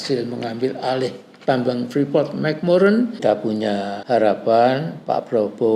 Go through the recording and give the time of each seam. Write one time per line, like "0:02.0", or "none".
0:03.4